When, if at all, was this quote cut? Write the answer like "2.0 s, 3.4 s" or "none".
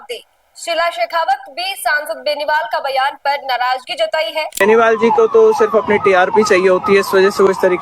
4.5 s